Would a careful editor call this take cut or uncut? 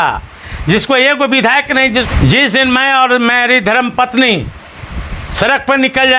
cut